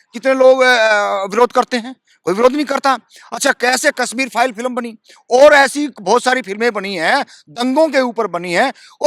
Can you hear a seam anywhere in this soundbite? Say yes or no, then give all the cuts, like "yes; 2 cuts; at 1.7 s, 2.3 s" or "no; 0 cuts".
no; 0 cuts